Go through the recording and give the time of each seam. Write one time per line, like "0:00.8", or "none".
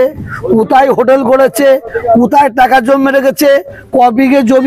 none